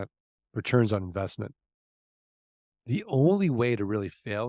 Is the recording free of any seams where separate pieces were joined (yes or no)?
yes